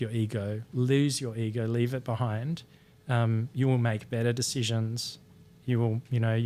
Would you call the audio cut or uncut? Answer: uncut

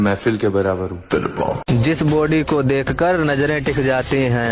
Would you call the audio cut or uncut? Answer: cut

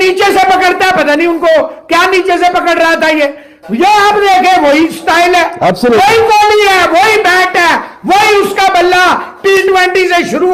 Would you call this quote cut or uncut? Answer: uncut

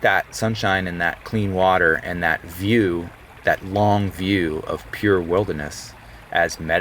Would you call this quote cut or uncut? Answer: uncut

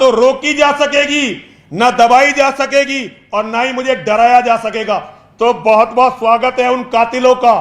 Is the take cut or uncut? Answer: uncut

